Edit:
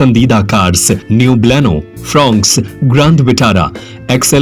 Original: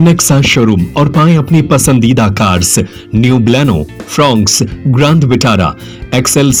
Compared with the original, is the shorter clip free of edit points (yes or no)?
no